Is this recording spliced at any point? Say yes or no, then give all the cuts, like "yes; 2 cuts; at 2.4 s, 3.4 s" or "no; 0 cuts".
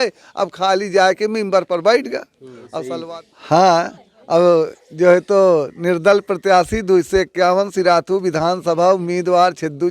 yes; 1 cut; at 2.9 s